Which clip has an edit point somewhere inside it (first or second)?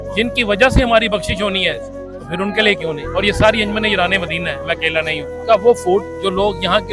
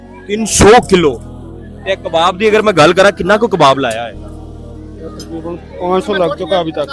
first